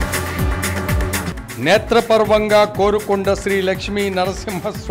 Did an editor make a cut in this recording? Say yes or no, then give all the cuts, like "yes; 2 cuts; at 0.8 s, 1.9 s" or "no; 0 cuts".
yes; 1 cut; at 1.2 s